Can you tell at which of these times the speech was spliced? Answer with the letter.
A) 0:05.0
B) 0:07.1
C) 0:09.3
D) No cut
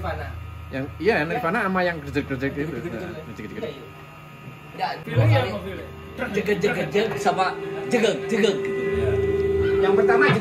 A